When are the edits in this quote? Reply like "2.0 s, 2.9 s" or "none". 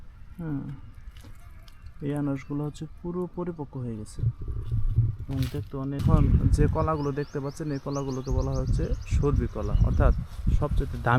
6.0 s